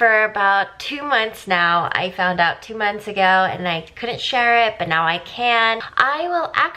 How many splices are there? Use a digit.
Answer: 1